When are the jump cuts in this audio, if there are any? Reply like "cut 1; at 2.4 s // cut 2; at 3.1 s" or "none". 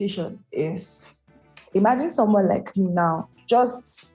none